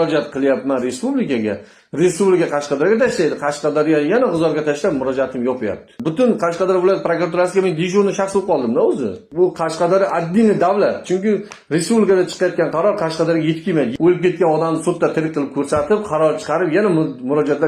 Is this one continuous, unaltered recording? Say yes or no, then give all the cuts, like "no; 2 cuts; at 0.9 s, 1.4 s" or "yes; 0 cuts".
no; 3 cuts; at 6.0 s, 9.2 s, 13.9 s